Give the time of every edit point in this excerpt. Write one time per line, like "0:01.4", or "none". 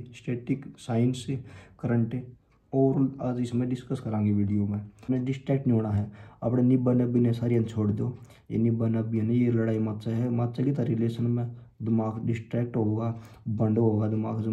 0:05.1